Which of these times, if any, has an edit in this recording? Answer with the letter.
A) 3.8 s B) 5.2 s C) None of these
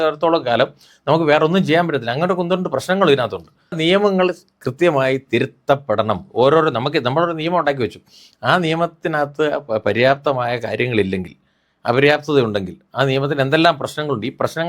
A